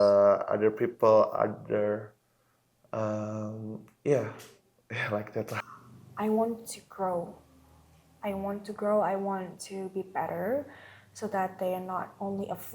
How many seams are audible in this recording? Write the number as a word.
one